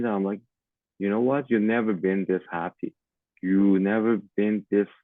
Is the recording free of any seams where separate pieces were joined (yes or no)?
yes